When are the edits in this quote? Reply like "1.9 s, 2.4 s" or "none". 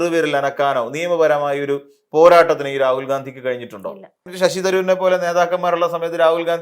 4.3 s